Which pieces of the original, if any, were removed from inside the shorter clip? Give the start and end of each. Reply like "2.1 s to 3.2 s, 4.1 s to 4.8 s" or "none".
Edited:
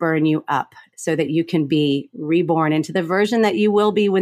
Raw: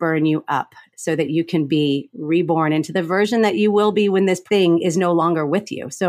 none

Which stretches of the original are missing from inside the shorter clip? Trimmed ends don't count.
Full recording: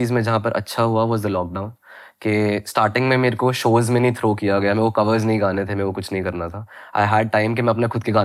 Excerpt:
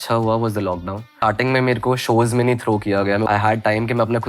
1.8 s to 2.7 s, 4.8 s to 6.9 s

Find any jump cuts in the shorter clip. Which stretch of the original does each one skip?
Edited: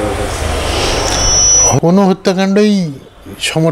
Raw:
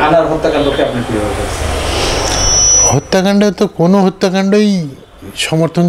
3.0 s to 3.8 s

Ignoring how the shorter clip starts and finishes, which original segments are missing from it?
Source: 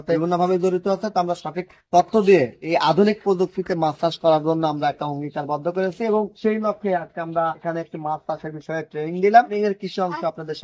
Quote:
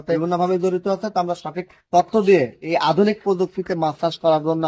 none

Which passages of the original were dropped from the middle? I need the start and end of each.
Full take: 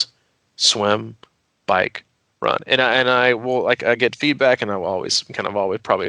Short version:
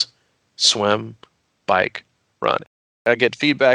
2.8 s to 3.7 s

